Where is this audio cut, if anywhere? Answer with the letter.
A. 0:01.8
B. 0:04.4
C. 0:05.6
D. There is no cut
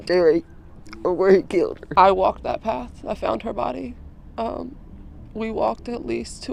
A